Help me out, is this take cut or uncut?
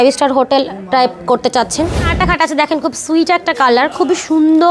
cut